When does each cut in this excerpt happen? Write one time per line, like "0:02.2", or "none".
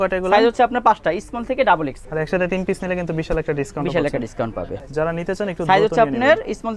0:02.0
0:04.8